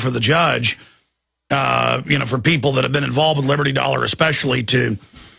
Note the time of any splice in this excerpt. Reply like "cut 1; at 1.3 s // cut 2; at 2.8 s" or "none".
cut 1; at 4.3 s